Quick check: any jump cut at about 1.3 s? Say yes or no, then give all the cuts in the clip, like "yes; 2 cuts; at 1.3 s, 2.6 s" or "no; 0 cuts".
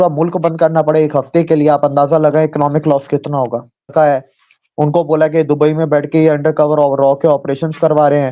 no; 1 cut; at 3.9 s